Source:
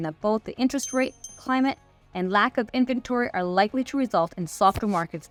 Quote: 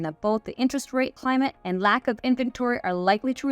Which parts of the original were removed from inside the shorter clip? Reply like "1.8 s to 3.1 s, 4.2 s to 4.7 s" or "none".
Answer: 1.3 s to 1.8 s